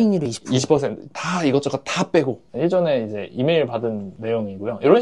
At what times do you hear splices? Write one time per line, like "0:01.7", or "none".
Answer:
0:02.4
0:04.1